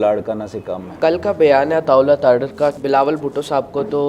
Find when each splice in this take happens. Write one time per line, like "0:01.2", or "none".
0:00.9
0:02.8